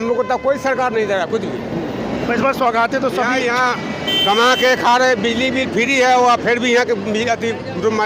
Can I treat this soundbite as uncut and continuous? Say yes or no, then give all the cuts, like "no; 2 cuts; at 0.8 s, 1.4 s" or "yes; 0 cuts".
yes; 0 cuts